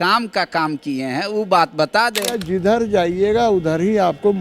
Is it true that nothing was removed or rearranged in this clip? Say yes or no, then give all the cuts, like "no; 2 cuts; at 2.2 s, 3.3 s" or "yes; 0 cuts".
no; 1 cut; at 2.4 s